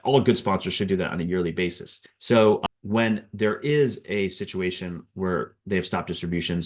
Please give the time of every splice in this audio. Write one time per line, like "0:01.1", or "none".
none